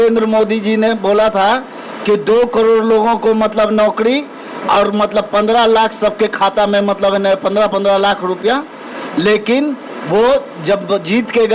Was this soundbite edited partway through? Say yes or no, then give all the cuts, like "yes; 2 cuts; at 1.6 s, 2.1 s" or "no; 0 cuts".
no; 0 cuts